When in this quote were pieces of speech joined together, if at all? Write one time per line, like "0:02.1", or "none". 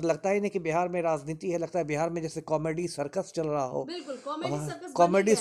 none